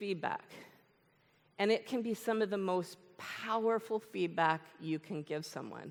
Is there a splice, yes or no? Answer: no